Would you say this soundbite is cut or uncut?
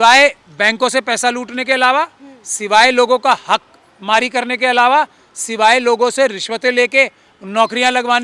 uncut